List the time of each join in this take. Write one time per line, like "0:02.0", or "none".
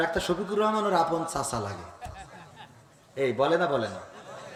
none